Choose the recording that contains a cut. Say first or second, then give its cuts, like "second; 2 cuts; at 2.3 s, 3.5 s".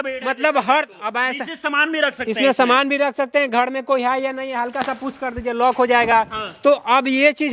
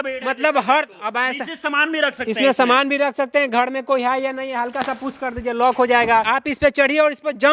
second; 1 cut; at 6.1 s